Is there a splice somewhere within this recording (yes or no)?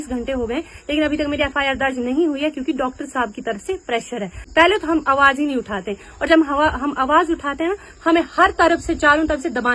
yes